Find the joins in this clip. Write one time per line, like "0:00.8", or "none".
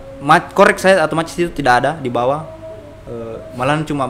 none